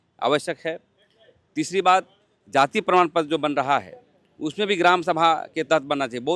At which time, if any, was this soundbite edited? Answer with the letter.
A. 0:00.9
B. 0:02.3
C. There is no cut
C